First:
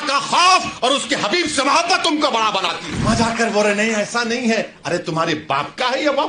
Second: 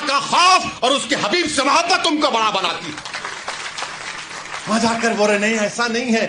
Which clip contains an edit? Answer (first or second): first